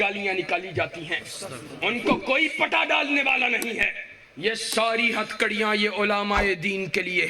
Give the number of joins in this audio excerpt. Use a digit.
0